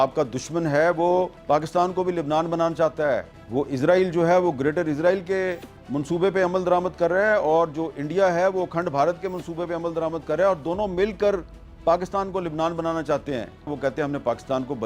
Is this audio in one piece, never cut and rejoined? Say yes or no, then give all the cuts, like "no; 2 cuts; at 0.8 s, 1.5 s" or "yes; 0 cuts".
no; 1 cut; at 13.7 s